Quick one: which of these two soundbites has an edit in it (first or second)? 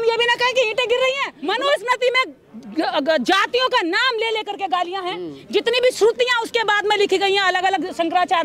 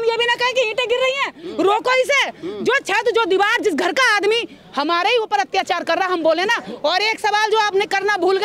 first